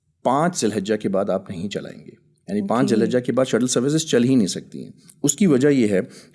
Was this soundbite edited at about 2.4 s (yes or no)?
no